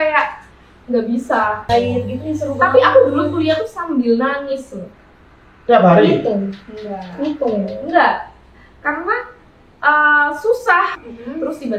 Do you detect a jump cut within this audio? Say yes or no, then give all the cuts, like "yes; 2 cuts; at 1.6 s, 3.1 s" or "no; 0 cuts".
yes; 2 cuts; at 1.7 s, 11.0 s